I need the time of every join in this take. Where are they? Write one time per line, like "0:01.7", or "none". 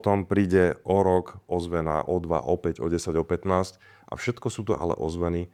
none